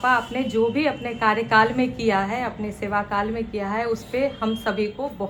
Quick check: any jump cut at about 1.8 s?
no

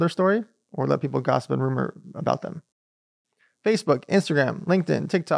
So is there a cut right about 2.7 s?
yes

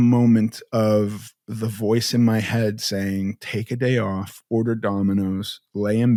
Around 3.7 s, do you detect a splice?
no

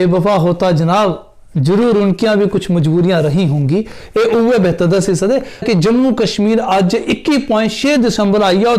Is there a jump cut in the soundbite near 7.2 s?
no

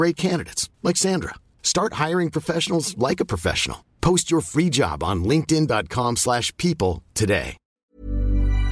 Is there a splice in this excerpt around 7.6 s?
yes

